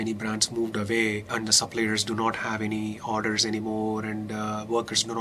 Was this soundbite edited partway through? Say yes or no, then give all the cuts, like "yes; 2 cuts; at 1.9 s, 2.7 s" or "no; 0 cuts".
yes; 1 cut; at 1.3 s